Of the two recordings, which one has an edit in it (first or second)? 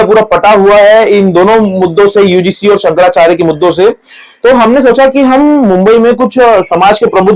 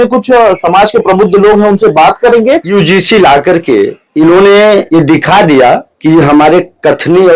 second